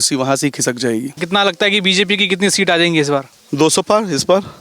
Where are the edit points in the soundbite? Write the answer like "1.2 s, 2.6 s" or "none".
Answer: 1.2 s